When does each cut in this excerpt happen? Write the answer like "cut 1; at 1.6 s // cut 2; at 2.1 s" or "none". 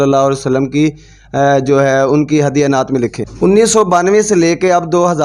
cut 1; at 3.2 s

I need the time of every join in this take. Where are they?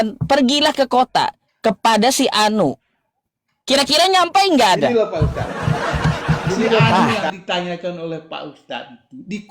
cut 1; at 7.2 s

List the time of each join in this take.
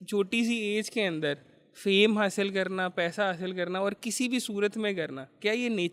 none

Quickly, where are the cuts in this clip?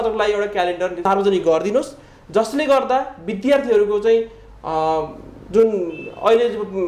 cut 1; at 1.0 s

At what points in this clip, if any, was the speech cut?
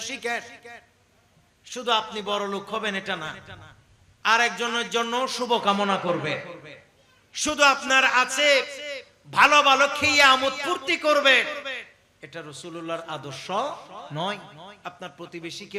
none

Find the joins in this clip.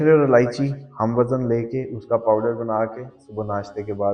none

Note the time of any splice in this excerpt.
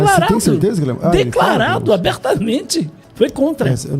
cut 1; at 3.0 s

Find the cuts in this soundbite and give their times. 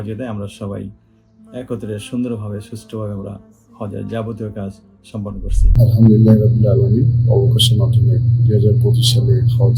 cut 1; at 5.7 s

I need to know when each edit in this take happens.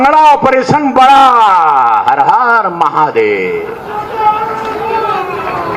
none

